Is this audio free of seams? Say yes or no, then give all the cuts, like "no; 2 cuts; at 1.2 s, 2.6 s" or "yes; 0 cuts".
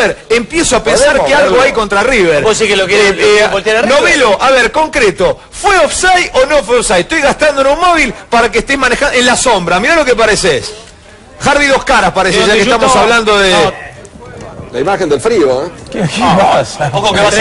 no; 1 cut; at 15.0 s